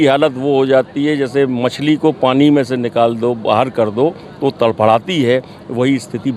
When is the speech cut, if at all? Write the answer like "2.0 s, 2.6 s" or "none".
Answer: none

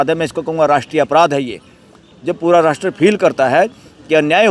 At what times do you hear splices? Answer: none

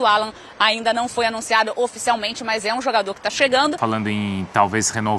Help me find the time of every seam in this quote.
3.8 s

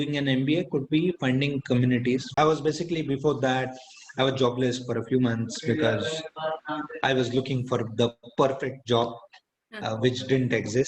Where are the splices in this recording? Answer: 2.3 s

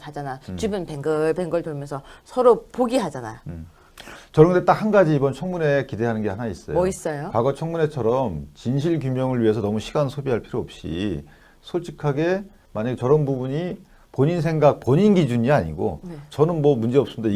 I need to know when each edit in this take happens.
16.2 s

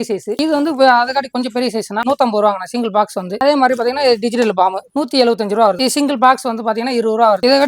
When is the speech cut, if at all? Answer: 2.0 s, 3.3 s, 5.8 s

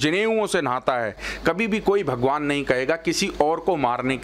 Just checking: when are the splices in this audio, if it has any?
1.2 s

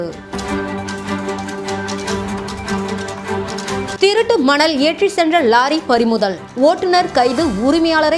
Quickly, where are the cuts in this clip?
none

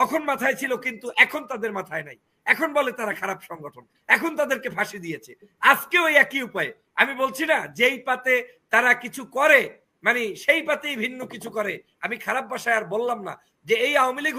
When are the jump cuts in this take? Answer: none

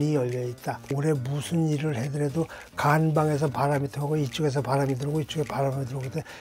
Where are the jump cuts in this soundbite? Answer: 0.9 s

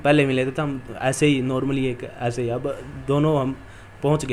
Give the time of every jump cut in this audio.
none

